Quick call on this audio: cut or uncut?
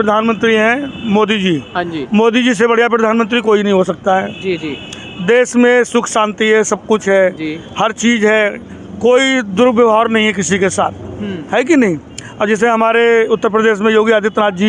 uncut